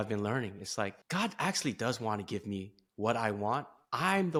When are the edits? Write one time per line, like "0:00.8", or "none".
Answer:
none